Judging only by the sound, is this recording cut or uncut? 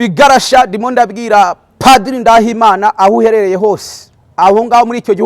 uncut